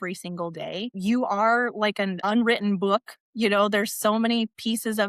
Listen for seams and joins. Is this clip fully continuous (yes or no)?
no